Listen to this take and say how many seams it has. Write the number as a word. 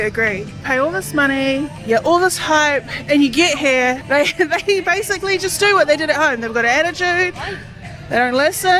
zero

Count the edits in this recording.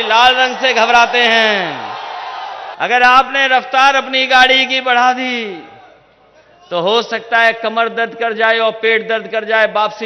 one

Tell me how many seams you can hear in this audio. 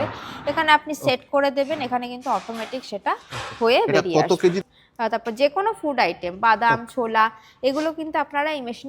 one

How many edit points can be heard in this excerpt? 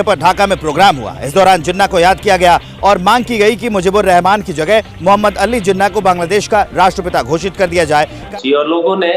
one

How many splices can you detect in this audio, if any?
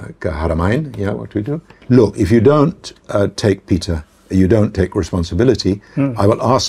one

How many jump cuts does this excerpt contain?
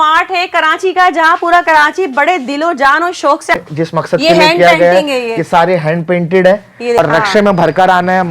two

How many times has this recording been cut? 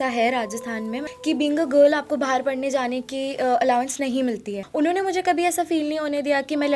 two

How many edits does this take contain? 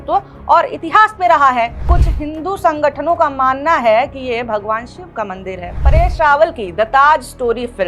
two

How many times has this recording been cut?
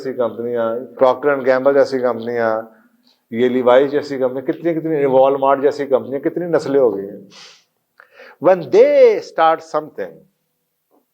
one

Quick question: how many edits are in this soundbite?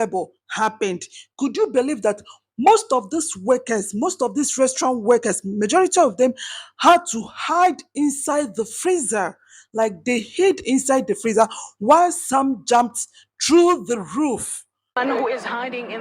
one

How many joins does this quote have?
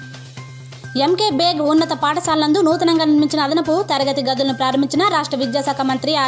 one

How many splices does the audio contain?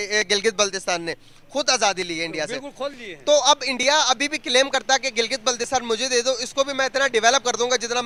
zero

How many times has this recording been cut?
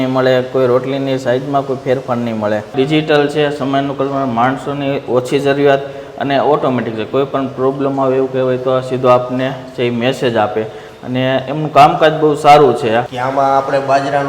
two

